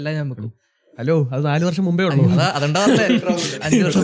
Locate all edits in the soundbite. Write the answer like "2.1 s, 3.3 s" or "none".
2.2 s